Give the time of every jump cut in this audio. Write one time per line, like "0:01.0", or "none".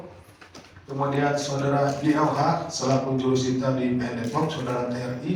none